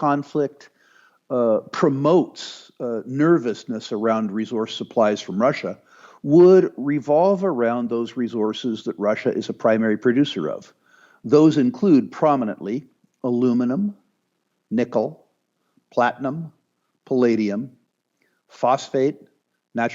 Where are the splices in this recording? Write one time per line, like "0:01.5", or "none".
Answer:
none